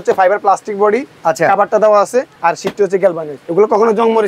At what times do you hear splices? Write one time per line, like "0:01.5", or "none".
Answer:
0:02.3
0:03.3